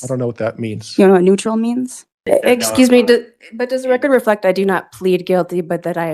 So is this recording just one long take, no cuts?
no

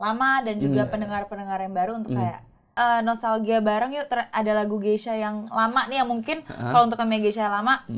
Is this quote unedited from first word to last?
no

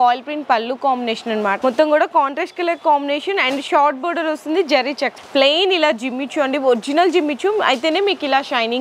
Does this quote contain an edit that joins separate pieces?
yes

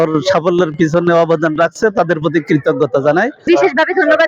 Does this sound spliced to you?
yes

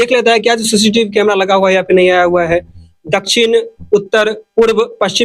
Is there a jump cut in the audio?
no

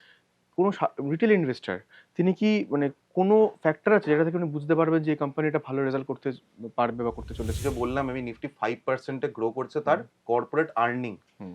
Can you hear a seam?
yes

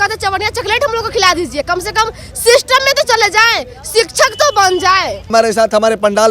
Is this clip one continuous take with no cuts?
no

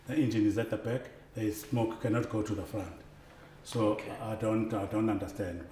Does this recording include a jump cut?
no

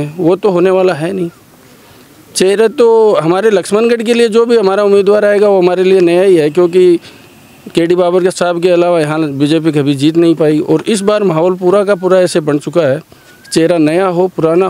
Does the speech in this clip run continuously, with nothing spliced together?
yes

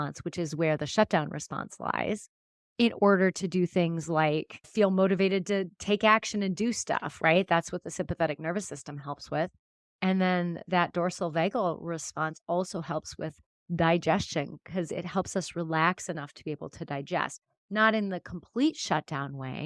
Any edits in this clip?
yes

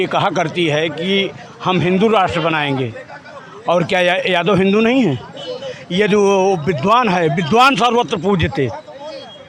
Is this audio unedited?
yes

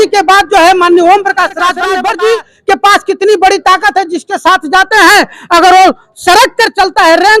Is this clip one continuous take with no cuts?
no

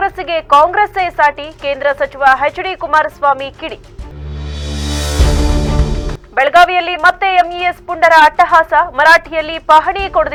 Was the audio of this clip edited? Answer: no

